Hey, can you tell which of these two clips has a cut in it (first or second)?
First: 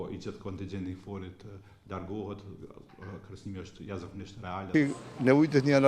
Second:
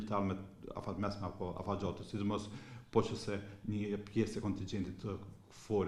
first